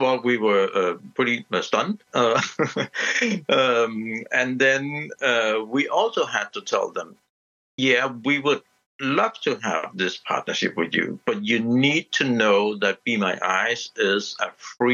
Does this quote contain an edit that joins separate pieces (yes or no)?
no